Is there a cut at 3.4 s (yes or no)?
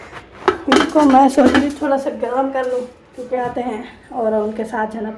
yes